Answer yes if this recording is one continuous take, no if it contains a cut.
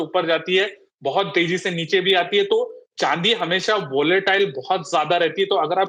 yes